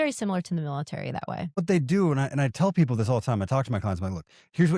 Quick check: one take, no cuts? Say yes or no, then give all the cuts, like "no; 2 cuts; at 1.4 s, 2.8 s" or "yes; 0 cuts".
no; 1 cut; at 1.6 s